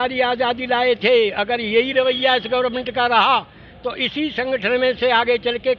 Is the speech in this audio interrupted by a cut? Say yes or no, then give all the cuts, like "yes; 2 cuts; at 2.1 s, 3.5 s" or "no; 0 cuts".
no; 0 cuts